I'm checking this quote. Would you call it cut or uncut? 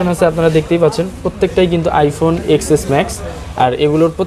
uncut